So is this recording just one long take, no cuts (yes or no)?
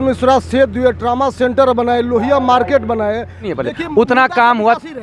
no